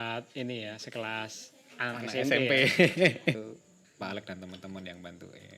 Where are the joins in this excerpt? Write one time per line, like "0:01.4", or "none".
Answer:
0:03.4